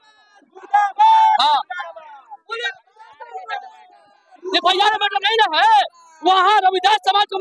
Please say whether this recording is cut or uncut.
uncut